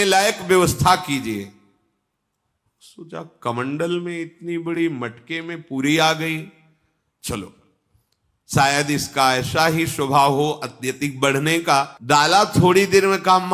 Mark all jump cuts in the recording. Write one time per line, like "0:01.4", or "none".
0:12.0

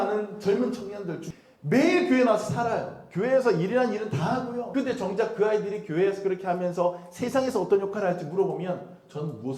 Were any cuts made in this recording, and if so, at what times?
0:01.2
0:04.6

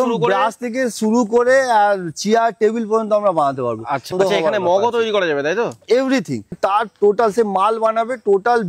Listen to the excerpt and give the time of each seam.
0:04.1
0:06.5

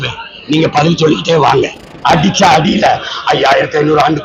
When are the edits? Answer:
0:01.8

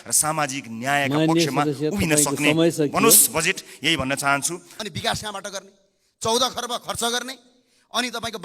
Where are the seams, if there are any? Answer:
0:04.7

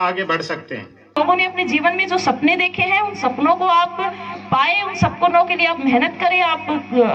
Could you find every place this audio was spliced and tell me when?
0:01.1

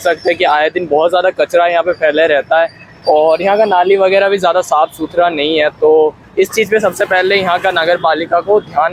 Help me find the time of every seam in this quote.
none

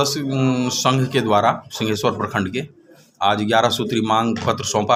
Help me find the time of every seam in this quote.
none

